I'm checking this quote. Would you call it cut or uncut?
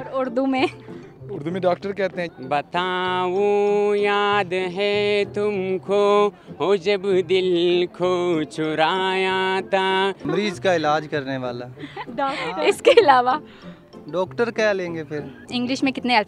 cut